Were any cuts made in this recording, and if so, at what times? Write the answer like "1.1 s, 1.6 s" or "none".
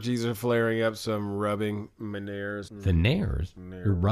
2.7 s